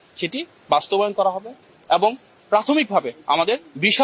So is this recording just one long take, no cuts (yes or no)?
yes